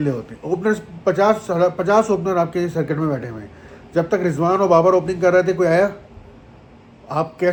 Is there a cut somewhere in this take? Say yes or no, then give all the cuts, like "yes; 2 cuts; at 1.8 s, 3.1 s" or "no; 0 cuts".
no; 0 cuts